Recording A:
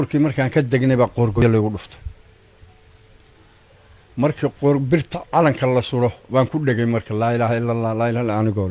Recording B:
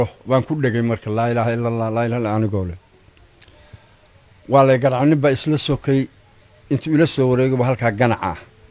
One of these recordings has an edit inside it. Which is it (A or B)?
A